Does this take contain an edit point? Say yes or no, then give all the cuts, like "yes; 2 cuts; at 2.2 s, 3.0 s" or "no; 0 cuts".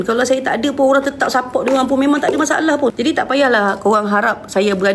yes; 1 cut; at 2.9 s